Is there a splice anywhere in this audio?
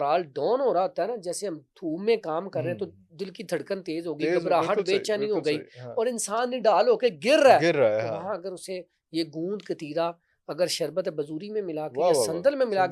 no; 0 cuts

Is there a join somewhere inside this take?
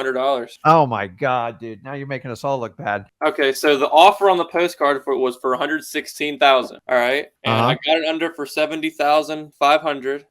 yes; 1 cut; at 3.1 s

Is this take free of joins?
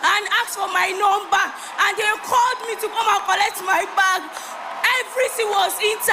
yes; 0 cuts

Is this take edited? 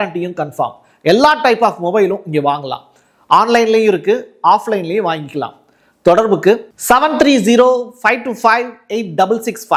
no; 0 cuts

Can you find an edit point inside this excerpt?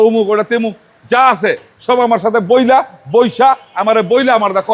no; 0 cuts

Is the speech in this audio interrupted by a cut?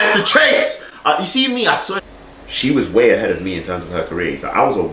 yes; 1 cut; at 2.0 s

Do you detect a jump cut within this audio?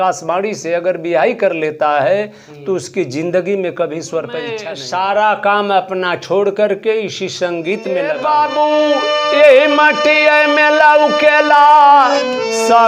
yes; 2 cuts; at 4.7 s, 8.1 s

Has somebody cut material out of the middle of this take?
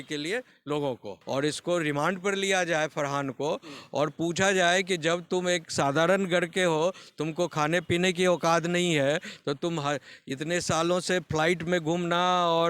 yes; 1 cut; at 1.2 s

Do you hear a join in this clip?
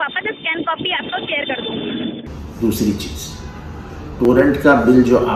yes; 1 cut; at 2.3 s

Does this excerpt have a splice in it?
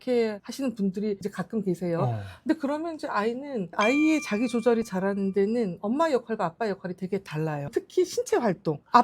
yes; 2 cuts; at 3.7 s, 7.6 s

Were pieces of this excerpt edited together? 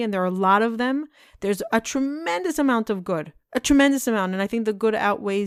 no; 0 cuts

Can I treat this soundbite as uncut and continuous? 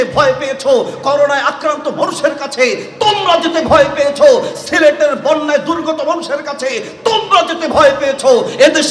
yes; 0 cuts

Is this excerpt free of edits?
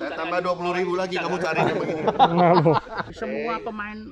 no; 1 cut; at 3.1 s

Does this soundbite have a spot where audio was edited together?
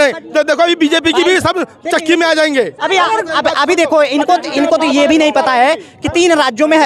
no; 0 cuts

